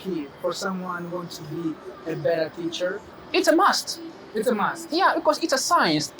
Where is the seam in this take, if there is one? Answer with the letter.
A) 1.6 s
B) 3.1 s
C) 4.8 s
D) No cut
B